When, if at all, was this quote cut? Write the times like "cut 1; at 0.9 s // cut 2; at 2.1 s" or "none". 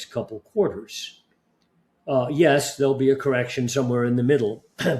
none